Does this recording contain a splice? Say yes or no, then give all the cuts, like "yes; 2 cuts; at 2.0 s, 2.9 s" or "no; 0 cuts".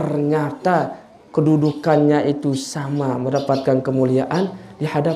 no; 0 cuts